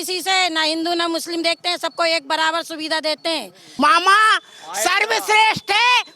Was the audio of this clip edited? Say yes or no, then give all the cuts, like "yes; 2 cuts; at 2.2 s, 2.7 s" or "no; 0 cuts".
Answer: yes; 1 cut; at 3.7 s